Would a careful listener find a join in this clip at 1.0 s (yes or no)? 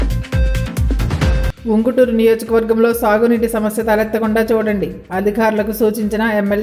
yes